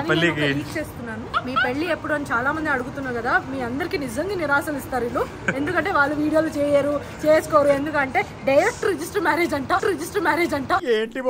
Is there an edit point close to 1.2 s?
yes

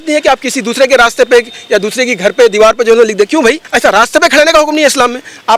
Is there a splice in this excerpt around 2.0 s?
no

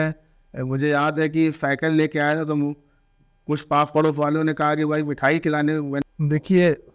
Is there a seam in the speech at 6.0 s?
yes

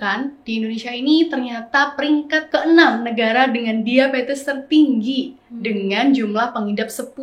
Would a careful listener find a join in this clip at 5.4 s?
no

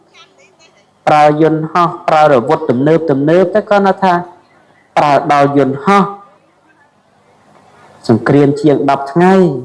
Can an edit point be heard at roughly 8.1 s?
no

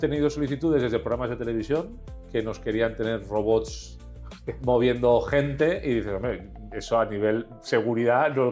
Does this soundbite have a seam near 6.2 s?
no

